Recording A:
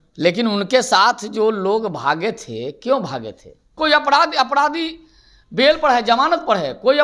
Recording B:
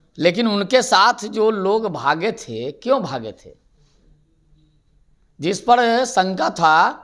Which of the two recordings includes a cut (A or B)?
A